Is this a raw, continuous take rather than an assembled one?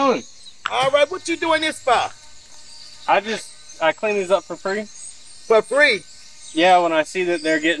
yes; 0 cuts

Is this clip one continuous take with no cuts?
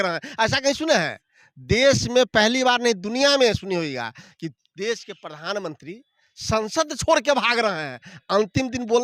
yes; 0 cuts

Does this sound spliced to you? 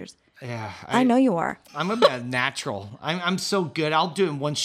yes; 1 cut; at 1.6 s

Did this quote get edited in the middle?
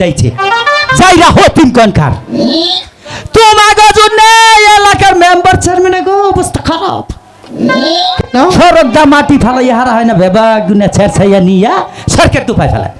no; 0 cuts

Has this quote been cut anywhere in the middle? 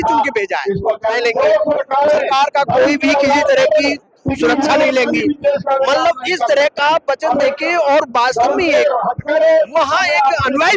yes; 1 cut; at 1.2 s

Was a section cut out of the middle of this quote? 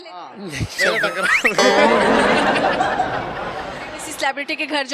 yes; 1 cut; at 3.8 s

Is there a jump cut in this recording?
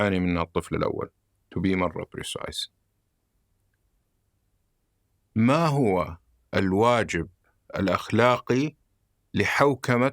no; 0 cuts

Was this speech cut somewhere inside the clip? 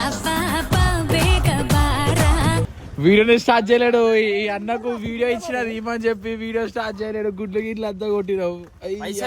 yes; 1 cut; at 2.8 s

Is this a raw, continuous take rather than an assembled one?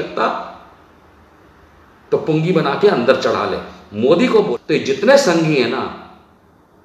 no; 1 cut; at 4.5 s

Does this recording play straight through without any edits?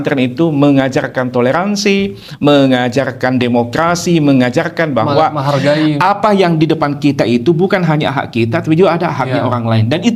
yes; 0 cuts

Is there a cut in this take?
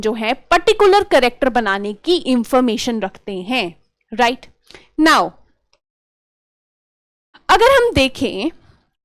no; 0 cuts

